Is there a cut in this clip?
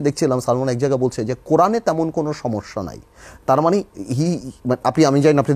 no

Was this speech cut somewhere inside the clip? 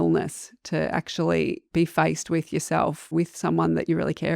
yes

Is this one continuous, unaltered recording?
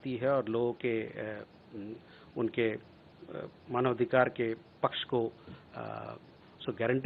yes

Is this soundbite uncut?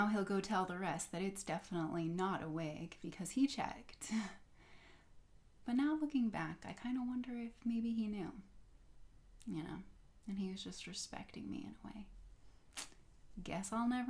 yes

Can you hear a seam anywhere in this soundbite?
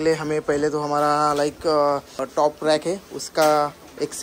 yes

